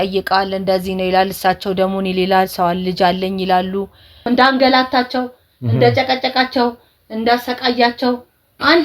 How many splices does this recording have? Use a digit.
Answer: 1